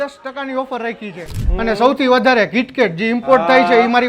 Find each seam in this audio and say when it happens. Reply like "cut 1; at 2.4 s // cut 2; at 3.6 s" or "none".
cut 1; at 1.4 s

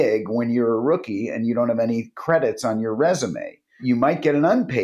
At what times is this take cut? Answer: cut 1; at 3.8 s

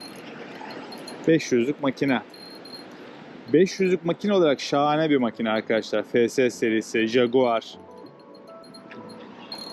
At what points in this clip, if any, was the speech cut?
none

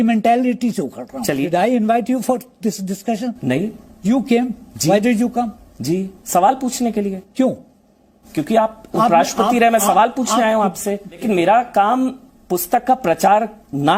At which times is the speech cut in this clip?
cut 1; at 1.4 s // cut 2; at 11.2 s

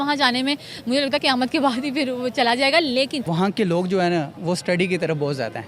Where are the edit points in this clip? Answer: cut 1; at 3.2 s

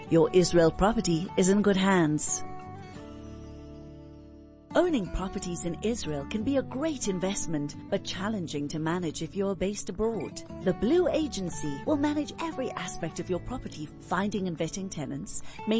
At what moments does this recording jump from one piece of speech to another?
cut 1; at 2.2 s // cut 2; at 4.6 s

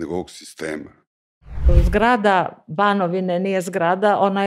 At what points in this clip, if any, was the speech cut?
cut 1; at 1.7 s

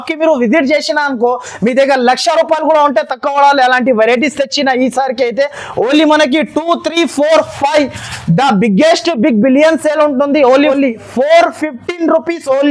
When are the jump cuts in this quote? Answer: cut 1; at 10.6 s

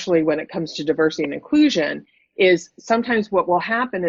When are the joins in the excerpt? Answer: none

